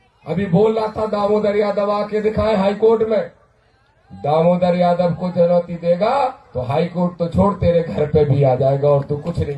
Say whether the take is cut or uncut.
uncut